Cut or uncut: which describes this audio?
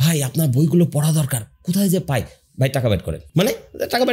cut